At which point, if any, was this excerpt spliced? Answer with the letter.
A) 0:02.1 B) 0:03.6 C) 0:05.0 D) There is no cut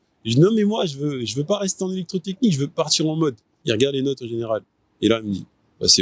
B